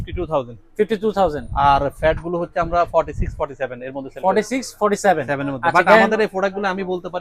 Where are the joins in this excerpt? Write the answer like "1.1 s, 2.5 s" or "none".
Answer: none